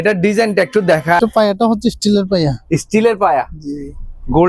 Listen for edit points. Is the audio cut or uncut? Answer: cut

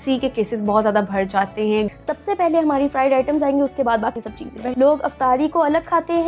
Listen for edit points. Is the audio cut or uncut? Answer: cut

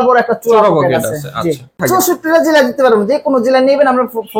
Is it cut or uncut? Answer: cut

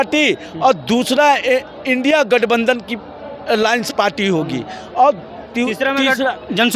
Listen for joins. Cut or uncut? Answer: uncut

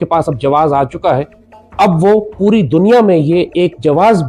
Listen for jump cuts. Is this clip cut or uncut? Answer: uncut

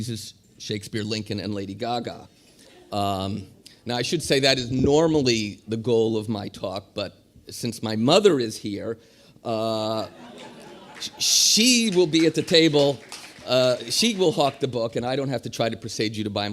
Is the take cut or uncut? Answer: cut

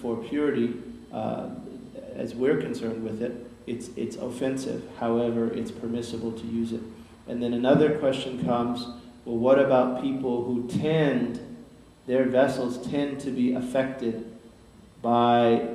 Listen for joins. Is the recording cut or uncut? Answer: cut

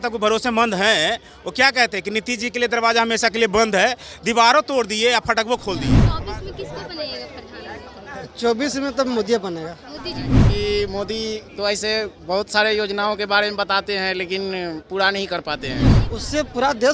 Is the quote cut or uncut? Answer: cut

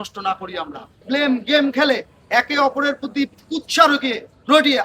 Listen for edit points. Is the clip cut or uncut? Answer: cut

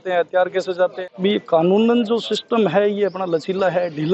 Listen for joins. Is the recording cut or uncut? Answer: cut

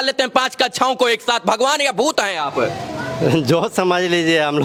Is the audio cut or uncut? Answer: uncut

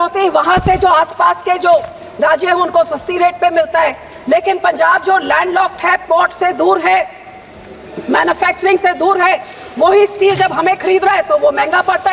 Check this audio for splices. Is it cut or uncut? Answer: uncut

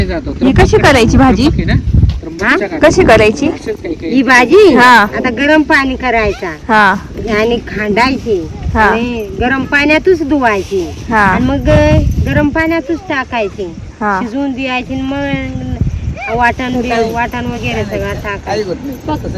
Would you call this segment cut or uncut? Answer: uncut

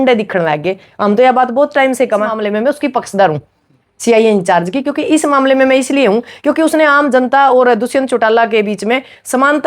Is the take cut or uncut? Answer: cut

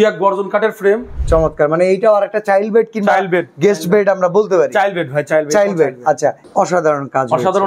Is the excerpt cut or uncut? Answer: cut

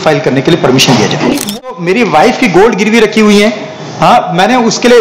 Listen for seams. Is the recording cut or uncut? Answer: cut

